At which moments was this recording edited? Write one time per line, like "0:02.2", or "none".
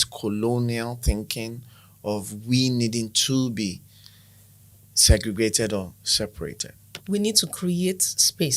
0:06.9